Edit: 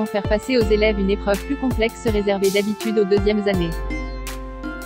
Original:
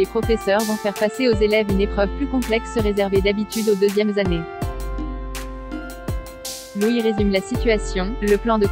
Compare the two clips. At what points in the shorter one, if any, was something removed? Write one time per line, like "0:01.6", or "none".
0:03.7